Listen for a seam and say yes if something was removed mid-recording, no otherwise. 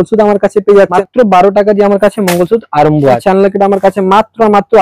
yes